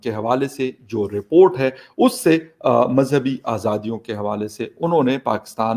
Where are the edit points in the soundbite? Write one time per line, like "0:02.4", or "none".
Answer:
none